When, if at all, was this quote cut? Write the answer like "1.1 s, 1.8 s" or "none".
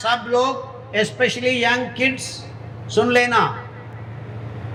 none